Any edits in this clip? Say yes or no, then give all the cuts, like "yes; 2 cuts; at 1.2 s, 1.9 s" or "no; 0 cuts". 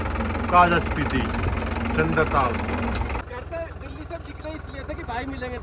yes; 1 cut; at 3.2 s